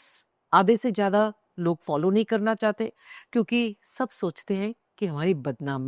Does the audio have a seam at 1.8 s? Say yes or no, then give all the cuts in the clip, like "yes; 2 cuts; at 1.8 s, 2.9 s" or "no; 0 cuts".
no; 0 cuts